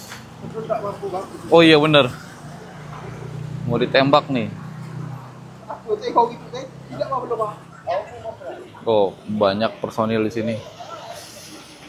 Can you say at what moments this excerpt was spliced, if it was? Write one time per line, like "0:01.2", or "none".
none